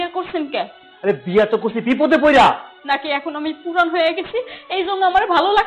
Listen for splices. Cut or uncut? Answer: cut